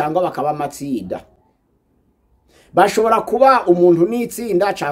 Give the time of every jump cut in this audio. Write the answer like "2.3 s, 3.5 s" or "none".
none